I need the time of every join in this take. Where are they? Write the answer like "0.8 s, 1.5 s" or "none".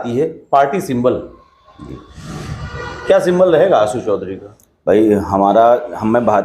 none